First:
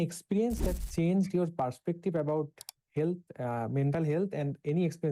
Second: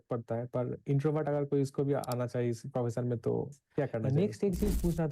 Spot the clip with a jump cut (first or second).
second